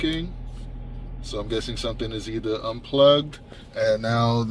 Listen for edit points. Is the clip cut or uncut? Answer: uncut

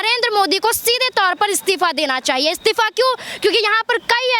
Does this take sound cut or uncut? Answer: uncut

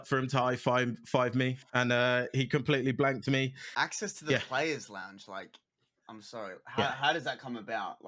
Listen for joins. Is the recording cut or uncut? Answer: cut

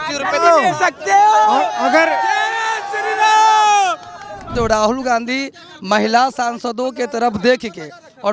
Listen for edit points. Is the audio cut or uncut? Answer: cut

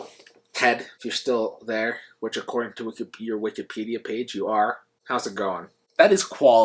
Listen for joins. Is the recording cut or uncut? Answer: cut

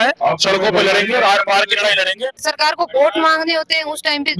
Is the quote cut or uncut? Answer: cut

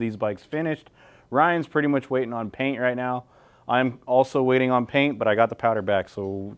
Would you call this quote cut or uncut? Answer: uncut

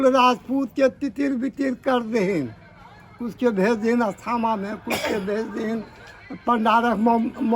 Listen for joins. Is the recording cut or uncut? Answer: uncut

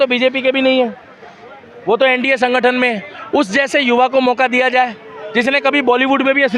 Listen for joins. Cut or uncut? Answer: uncut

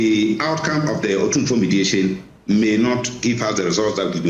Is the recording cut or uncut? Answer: uncut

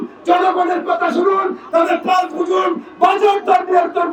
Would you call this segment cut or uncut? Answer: uncut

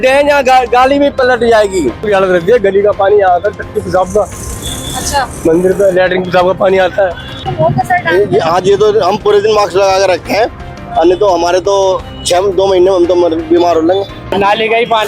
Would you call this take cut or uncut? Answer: cut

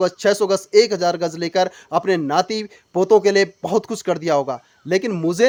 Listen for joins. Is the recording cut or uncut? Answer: uncut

